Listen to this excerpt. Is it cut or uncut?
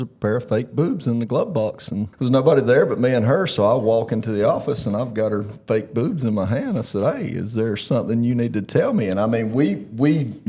cut